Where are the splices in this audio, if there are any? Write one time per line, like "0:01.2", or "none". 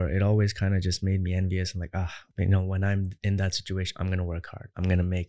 0:02.2